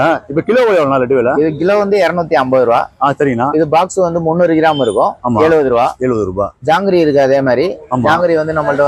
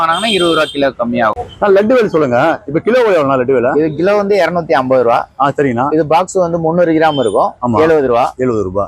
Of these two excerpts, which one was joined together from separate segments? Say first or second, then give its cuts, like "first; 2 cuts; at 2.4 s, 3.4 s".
second; 1 cut; at 1.3 s